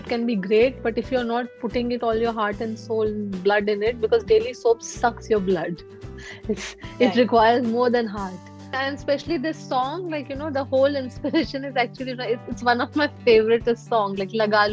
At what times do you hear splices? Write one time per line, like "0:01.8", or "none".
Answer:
0:08.8